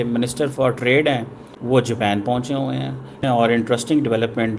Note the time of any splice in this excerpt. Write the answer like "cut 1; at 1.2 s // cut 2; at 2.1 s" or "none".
cut 1; at 3.2 s